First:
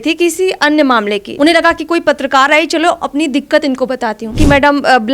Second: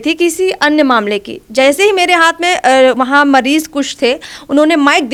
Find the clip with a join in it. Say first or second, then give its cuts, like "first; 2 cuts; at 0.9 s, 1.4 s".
first; 2 cuts; at 1.2 s, 4.4 s